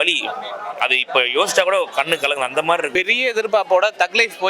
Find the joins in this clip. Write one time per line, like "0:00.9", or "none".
0:02.9